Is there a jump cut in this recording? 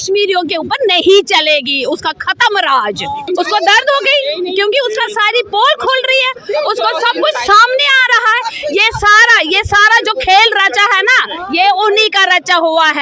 yes; 1 cut; at 3.2 s

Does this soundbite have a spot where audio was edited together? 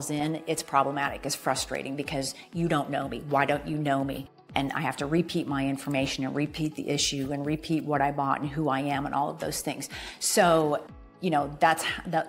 no; 0 cuts

